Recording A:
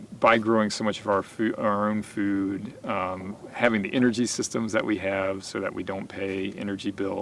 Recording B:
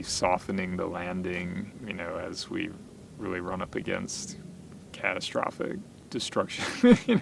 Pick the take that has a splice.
B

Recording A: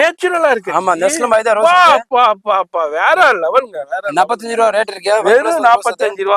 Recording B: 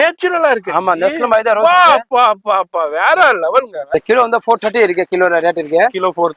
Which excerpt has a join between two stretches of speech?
B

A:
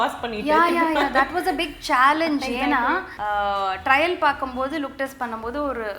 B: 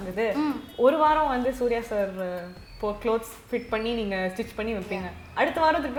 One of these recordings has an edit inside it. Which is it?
A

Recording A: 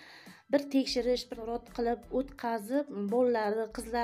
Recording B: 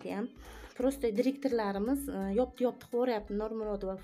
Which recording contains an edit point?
A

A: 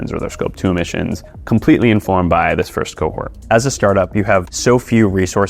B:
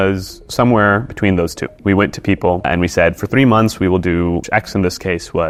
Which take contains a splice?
A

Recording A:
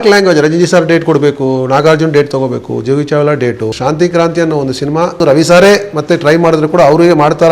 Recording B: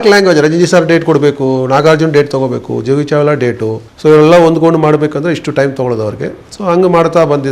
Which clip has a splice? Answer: A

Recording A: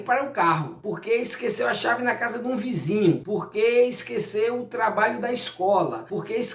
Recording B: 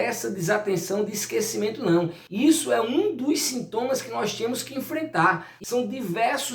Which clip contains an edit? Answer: B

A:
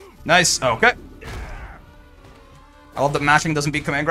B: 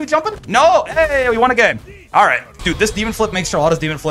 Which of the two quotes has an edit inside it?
B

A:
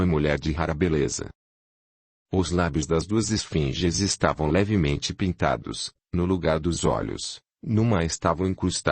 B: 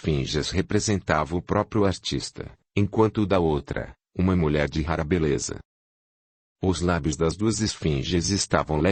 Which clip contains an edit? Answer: A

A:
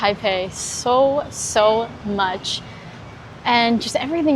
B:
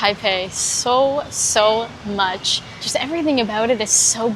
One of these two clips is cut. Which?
B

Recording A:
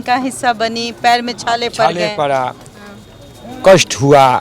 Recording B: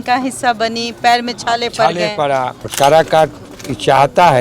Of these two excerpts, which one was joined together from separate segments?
B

